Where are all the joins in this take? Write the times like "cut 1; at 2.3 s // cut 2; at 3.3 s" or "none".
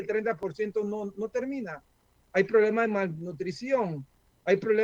none